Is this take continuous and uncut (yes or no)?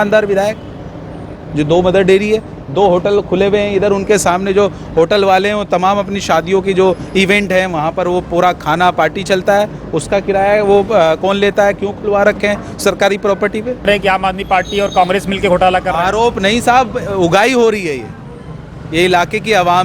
no